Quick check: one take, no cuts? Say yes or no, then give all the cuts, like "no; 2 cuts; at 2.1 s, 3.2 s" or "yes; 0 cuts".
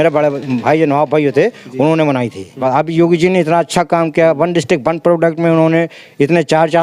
no; 1 cut; at 2.6 s